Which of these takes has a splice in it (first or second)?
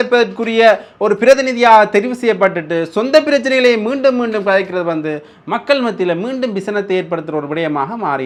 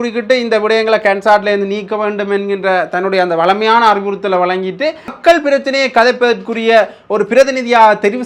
second